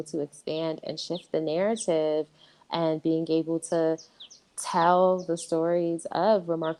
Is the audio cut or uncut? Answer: uncut